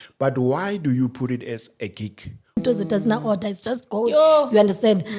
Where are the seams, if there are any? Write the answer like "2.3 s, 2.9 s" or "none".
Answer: 2.6 s